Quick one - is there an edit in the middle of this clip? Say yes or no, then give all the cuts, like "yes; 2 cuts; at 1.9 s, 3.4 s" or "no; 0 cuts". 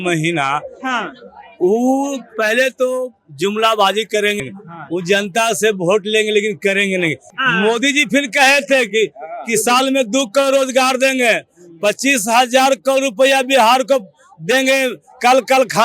yes; 2 cuts; at 4.4 s, 7.3 s